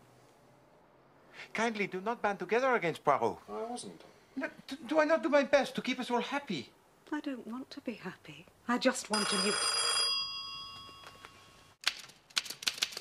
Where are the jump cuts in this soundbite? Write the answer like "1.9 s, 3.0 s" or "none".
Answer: 4.3 s

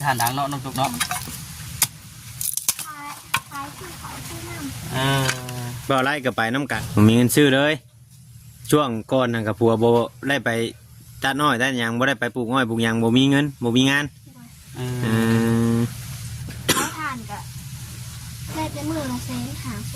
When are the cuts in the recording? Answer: 6.8 s

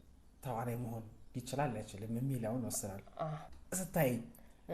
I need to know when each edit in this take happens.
3.5 s

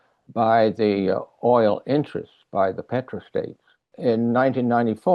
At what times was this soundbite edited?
3.9 s

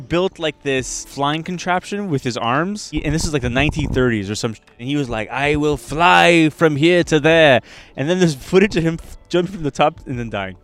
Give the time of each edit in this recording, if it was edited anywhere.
1.0 s, 2.9 s

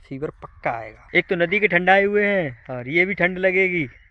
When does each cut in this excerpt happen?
1.1 s

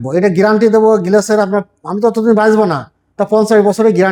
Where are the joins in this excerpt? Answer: none

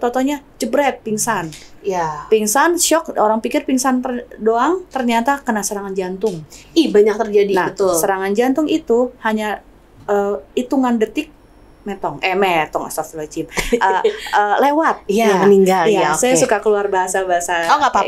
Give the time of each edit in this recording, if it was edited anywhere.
none

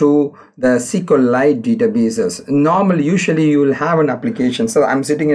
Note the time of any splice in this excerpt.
none

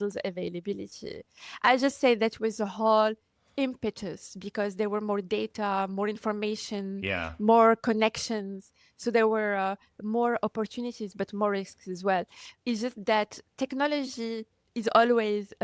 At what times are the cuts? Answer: 14.6 s

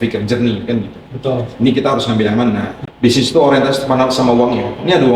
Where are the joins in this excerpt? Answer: 2.7 s

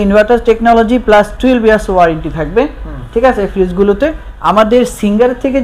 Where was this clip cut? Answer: 4.3 s

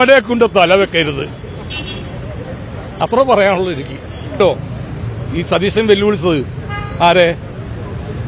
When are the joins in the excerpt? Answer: 4.4 s

